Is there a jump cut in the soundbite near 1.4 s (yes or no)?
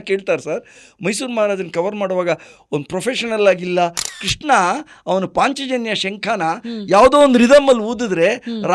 no